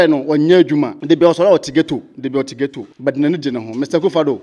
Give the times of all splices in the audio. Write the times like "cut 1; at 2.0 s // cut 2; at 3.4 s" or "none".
cut 1; at 1.0 s // cut 2; at 2.9 s